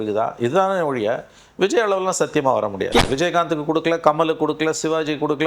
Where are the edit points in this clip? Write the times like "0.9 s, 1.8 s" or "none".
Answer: 3.0 s